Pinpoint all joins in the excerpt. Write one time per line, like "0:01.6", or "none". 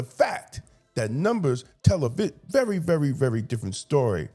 none